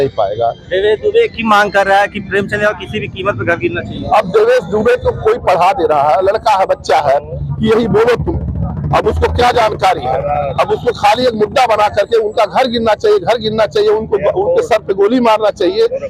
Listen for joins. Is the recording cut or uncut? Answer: uncut